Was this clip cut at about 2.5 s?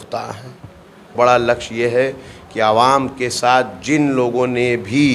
no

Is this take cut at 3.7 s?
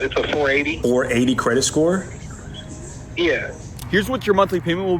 yes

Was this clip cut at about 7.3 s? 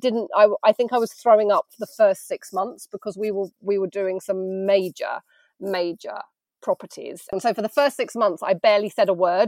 yes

